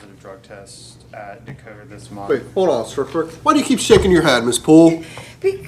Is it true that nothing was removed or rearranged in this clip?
no; 1 cut; at 1.9 s

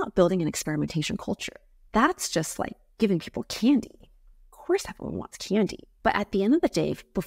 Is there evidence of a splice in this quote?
yes; 1 cut; at 1.8 s

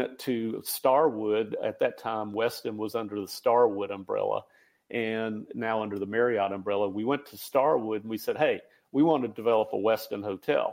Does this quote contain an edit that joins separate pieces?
no; 0 cuts

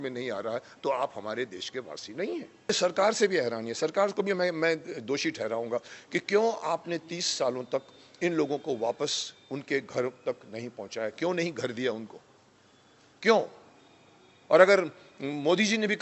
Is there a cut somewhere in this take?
yes; 1 cut; at 2.7 s

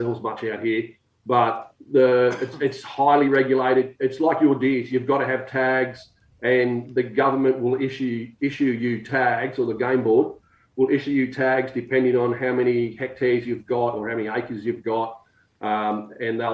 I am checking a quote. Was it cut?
no; 0 cuts

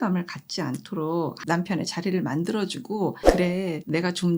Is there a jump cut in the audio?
yes; 2 cuts; at 1.4 s, 3.2 s

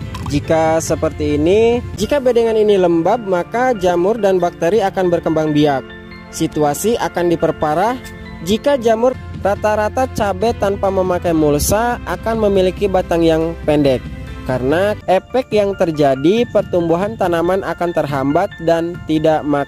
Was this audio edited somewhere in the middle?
yes; 3 cuts; at 1.9 s, 9.2 s, 15.0 s

